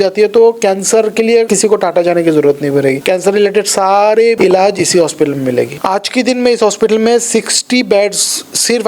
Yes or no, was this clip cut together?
yes